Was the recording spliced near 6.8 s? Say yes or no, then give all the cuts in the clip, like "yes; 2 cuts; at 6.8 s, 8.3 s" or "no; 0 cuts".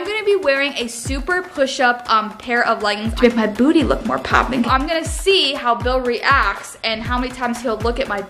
no; 2 cuts; at 3.1 s, 4.7 s